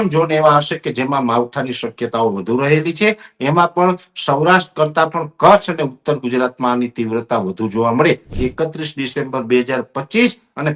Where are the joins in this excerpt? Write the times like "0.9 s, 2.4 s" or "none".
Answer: 8.3 s